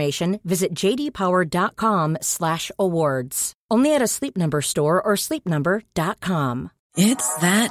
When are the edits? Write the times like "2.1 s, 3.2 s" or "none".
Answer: 6.8 s